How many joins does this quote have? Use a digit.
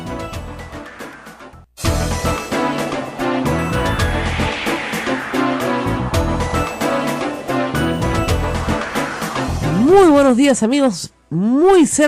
2